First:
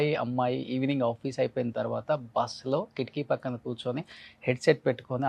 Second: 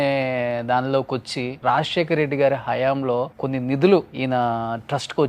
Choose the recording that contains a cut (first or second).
second